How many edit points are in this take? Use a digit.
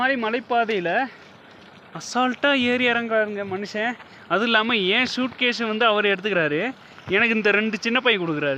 0